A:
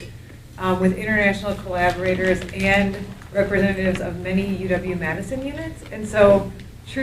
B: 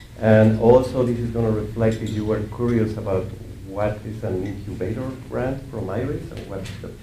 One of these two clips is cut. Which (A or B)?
A